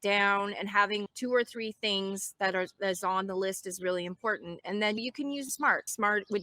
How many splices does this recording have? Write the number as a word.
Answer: two